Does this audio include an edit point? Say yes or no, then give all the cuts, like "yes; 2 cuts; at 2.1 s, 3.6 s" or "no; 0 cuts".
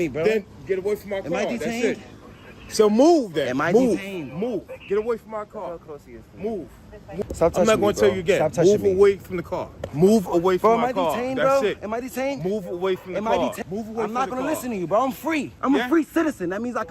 yes; 4 cuts; at 7.2 s, 9.9 s, 13.6 s, 15.5 s